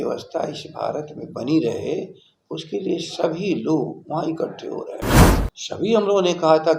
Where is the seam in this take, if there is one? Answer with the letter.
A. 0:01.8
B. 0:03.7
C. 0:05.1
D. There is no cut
C